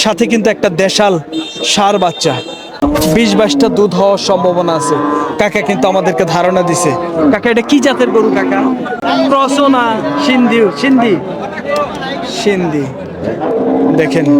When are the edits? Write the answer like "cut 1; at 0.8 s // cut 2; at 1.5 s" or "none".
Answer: cut 1; at 2.8 s // cut 2; at 9.0 s